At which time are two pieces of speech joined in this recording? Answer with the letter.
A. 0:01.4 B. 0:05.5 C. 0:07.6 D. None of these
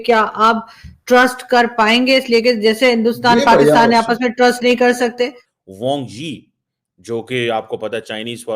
B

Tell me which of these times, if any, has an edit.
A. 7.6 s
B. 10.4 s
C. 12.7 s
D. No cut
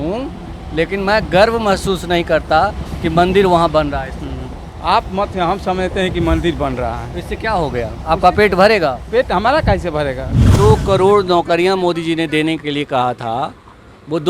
B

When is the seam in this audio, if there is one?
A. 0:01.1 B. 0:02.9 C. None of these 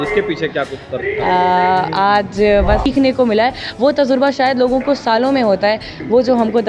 B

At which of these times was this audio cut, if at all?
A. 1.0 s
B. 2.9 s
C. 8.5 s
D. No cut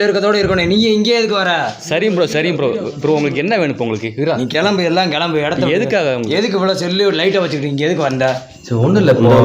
C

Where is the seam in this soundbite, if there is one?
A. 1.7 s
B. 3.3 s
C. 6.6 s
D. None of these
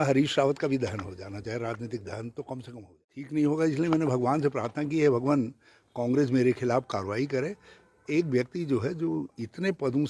B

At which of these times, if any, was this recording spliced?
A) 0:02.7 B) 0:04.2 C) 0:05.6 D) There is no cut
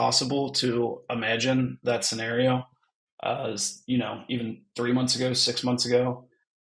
D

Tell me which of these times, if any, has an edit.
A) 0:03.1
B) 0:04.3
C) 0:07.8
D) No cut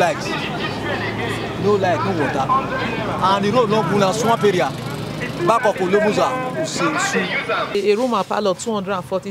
C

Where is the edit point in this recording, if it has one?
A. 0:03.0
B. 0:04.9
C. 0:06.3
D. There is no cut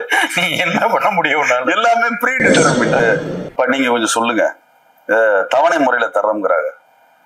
A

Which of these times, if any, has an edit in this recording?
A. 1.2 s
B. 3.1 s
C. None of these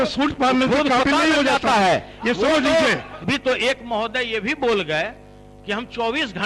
B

